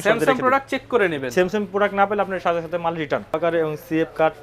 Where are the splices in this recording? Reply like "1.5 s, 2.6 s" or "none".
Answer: 3.4 s